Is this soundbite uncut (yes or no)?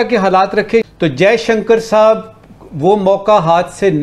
no